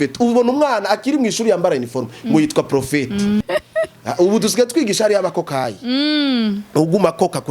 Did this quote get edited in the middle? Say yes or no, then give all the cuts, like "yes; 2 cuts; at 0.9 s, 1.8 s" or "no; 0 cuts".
yes; 1 cut; at 3.4 s